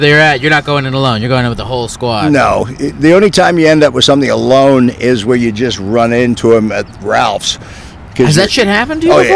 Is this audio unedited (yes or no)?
yes